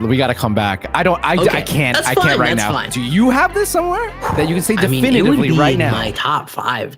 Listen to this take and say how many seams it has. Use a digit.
2